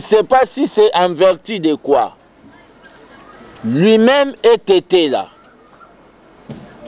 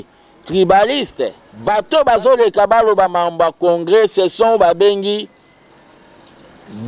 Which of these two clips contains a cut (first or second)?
second